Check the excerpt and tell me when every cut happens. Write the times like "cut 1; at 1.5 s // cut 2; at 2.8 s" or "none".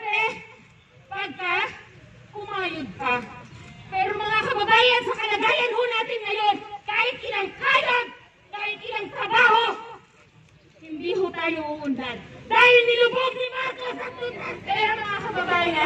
cut 1; at 14.4 s